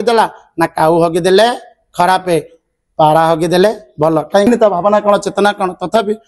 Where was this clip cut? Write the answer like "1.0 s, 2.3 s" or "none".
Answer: 4.4 s